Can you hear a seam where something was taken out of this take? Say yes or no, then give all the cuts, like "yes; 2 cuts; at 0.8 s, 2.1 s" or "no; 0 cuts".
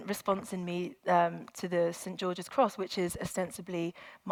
no; 0 cuts